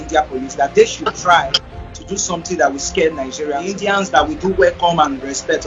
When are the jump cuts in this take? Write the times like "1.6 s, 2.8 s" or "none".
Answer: 3.8 s